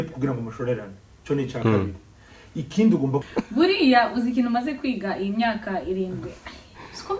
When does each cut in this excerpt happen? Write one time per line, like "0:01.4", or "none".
0:03.2

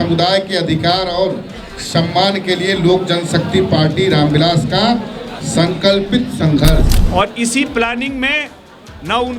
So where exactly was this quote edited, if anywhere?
0:07.0

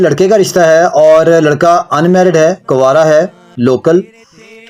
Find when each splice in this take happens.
0:03.5

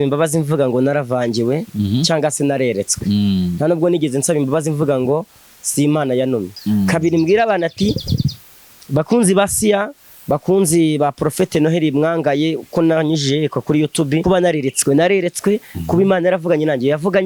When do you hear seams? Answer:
0:06.5
0:14.2

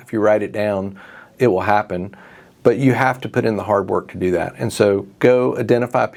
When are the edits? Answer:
none

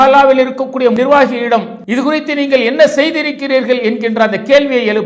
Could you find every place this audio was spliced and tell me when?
0:00.9
0:01.8

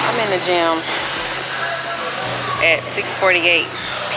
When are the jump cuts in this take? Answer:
none

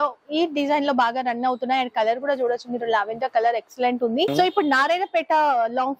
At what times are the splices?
0:04.3

